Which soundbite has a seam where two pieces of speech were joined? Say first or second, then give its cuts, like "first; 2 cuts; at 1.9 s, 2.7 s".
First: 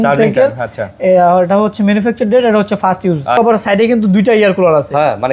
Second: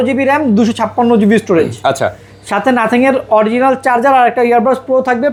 first; 1 cut; at 3.4 s